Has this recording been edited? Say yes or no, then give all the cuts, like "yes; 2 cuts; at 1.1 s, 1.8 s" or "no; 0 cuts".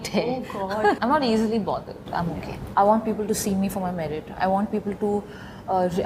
yes; 2 cuts; at 1.0 s, 2.5 s